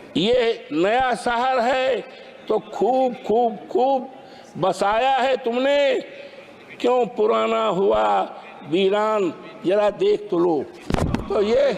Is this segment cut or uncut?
uncut